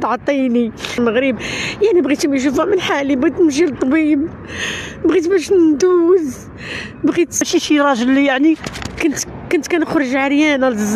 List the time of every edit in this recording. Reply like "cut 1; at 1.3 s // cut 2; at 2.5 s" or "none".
cut 1; at 1.0 s // cut 2; at 7.5 s